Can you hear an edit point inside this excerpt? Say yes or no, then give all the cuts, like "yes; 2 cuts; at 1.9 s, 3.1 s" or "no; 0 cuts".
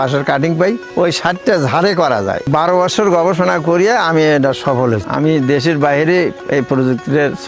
yes; 3 cuts; at 0.8 s, 2.5 s, 5.1 s